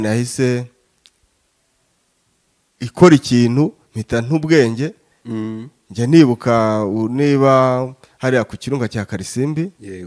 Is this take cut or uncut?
uncut